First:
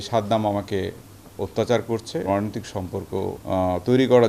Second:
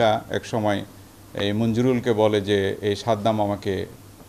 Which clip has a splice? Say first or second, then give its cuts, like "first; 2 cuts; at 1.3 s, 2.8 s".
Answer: first; 2 cuts; at 2.3 s, 3.4 s